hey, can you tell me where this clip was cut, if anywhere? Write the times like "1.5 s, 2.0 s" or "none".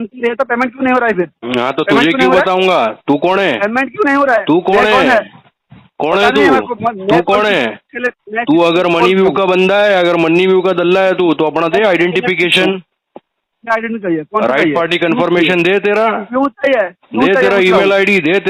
none